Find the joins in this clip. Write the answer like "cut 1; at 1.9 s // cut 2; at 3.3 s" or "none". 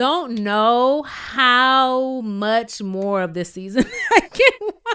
none